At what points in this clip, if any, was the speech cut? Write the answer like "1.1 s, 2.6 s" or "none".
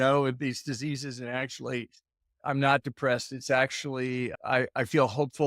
2.2 s, 4.3 s